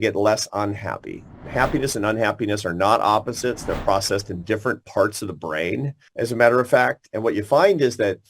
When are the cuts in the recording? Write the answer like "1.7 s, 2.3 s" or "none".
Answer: 1.3 s, 6.0 s